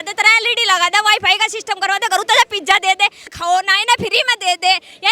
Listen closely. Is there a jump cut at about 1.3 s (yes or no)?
no